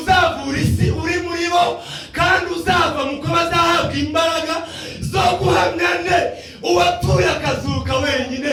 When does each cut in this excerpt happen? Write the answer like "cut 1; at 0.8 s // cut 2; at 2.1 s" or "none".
none

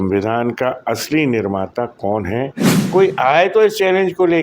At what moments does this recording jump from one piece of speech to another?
cut 1; at 2.7 s

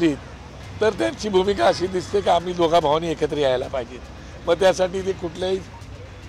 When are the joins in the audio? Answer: none

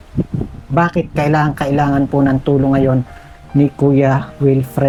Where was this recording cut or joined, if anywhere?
none

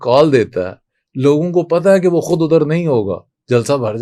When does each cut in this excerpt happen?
none

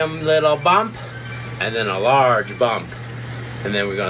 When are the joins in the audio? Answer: none

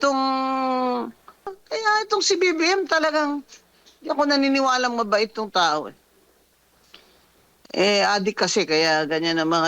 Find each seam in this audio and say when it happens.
cut 1; at 1.6 s

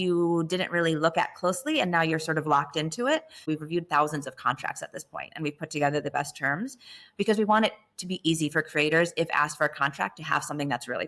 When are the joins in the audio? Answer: cut 1; at 3.5 s

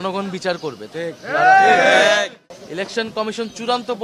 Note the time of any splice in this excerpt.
cut 1; at 2.4 s

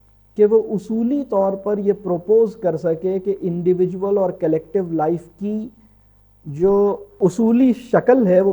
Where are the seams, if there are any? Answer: cut 1; at 7.1 s

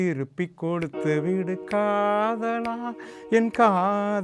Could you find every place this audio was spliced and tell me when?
none

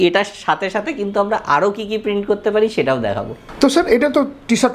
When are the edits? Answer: none

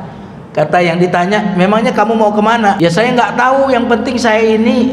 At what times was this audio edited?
cut 1; at 2.8 s

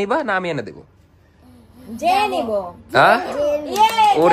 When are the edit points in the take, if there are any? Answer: none

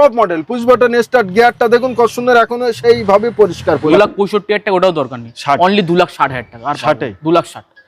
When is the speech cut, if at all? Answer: cut 1; at 3.8 s

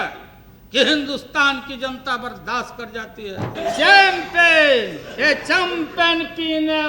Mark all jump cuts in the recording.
cut 1; at 3.5 s

